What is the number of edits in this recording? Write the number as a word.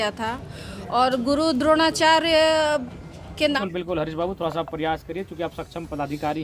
one